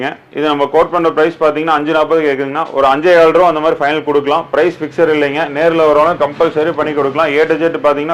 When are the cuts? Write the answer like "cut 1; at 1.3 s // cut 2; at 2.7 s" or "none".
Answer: none